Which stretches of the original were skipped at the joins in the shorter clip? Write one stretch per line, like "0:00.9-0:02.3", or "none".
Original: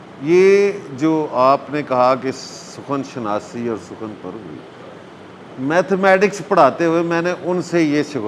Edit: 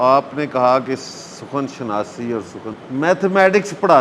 0:04.2-0:05.5